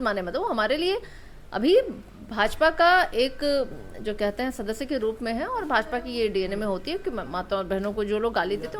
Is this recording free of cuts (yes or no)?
yes